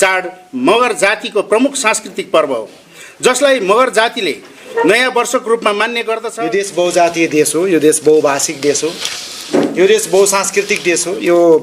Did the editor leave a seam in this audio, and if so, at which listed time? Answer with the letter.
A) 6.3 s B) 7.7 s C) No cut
A